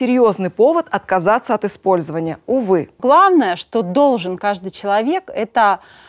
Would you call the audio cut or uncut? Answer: cut